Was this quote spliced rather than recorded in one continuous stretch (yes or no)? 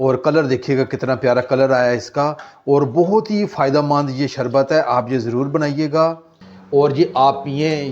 yes